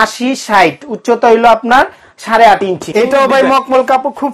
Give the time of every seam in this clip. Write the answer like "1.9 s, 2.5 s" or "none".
2.9 s